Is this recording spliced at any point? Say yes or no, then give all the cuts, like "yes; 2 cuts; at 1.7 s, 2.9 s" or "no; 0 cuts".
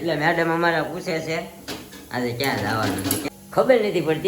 yes; 1 cut; at 3.3 s